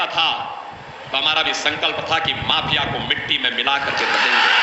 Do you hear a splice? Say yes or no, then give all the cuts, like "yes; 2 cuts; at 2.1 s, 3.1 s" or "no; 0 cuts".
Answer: no; 0 cuts